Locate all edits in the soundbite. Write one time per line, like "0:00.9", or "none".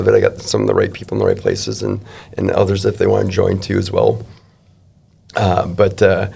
none